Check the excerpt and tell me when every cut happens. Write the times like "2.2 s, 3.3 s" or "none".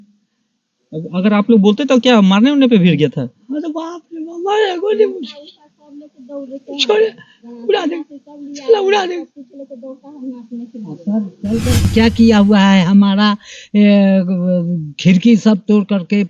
11.9 s